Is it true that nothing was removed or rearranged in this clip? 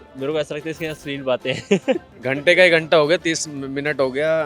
no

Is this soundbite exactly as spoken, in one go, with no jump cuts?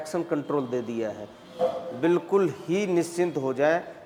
yes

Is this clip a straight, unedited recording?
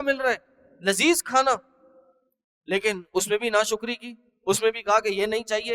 yes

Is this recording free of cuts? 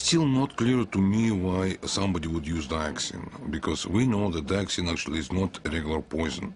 no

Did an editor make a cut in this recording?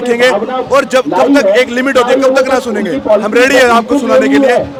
no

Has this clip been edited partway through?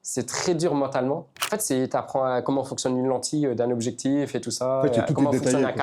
yes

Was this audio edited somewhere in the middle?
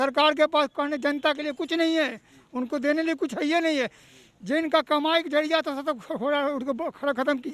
no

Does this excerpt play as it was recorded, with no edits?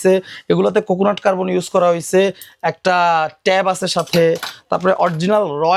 yes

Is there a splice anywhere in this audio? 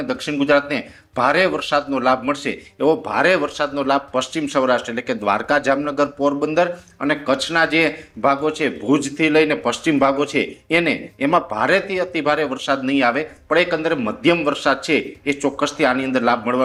no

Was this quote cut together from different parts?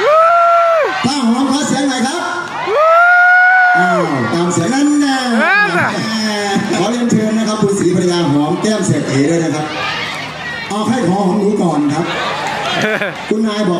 no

